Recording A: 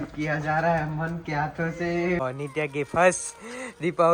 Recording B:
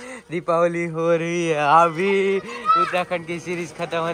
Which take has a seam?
A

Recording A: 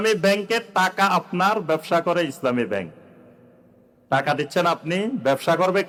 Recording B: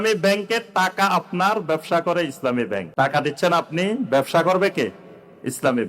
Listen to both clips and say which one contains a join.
B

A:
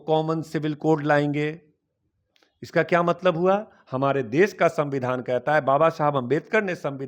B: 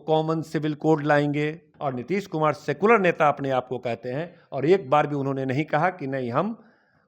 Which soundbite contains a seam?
B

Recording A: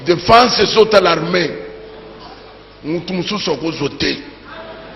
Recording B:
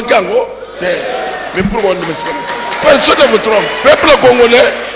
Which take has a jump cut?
B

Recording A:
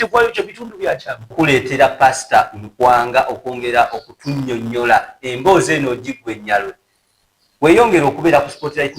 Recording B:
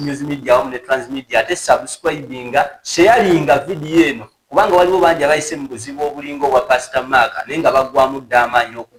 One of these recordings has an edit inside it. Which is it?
A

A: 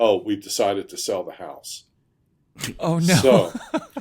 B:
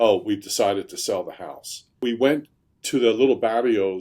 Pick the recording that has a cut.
B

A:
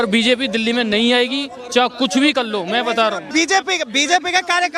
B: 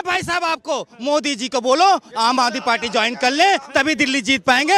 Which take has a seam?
A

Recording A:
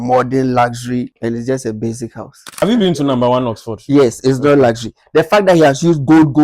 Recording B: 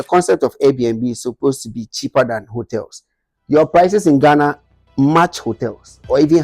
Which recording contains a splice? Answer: A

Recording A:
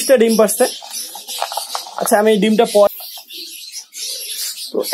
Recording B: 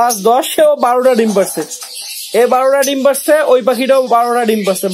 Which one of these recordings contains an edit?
A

